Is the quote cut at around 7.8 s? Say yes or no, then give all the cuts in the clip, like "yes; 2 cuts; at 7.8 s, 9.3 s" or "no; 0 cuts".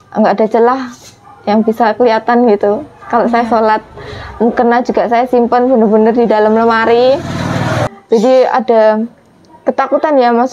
yes; 1 cut; at 7.8 s